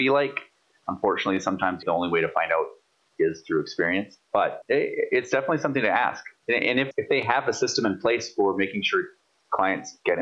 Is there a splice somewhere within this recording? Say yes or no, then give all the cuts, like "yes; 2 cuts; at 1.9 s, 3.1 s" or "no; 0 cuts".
yes; 3 cuts; at 1.8 s, 4.6 s, 6.9 s